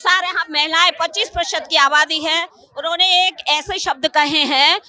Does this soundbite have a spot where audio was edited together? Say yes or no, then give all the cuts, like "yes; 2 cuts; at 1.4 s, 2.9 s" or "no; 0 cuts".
no; 0 cuts